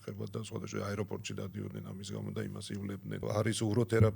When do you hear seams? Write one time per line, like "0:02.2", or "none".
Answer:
0:03.2